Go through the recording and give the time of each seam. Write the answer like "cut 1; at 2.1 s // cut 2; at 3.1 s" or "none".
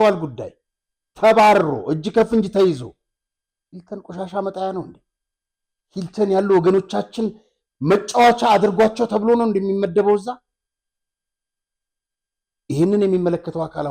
none